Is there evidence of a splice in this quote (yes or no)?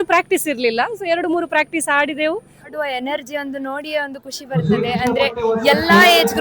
yes